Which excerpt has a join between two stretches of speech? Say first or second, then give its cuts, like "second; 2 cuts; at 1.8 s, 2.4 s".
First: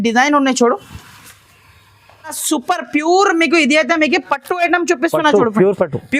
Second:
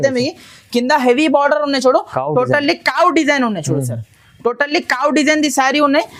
first; 1 cut; at 2.4 s